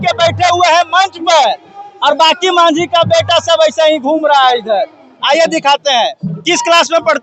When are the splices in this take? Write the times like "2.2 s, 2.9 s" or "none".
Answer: none